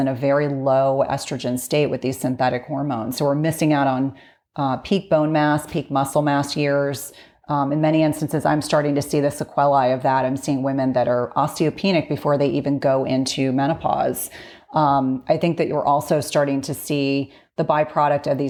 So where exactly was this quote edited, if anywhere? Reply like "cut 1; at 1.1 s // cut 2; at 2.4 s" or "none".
none